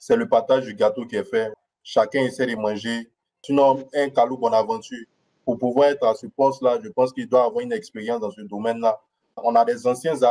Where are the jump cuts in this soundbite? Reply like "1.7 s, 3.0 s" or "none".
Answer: 1.5 s, 3.4 s, 9.4 s